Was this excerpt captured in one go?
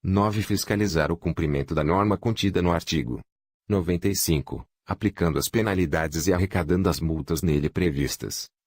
yes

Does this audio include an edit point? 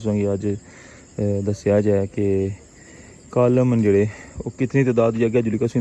no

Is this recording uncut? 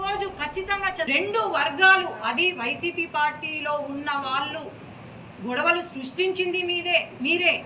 no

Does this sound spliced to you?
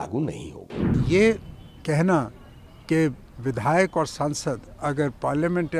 yes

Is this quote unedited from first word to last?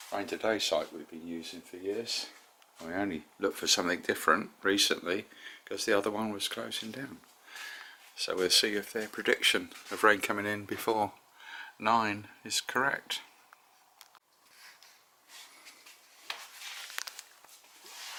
yes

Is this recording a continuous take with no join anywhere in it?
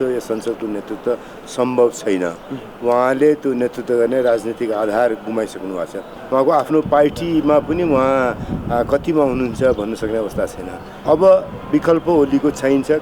no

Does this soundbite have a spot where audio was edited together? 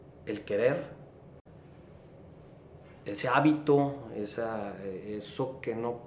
no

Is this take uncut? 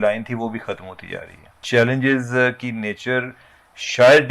no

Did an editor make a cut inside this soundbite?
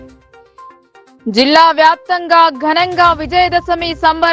no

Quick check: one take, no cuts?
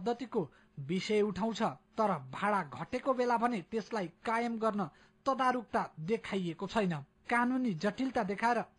no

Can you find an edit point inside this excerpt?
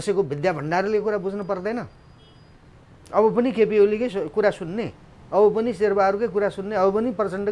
no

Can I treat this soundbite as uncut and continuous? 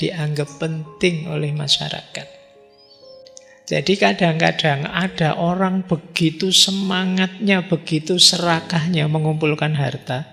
yes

